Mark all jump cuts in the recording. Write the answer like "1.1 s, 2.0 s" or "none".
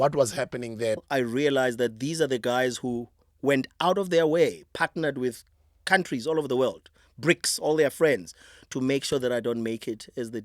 1.0 s